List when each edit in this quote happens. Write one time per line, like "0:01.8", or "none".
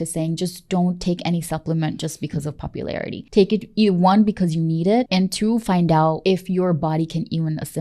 0:03.2
0:05.1
0:06.2